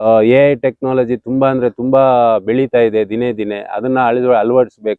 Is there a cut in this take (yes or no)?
no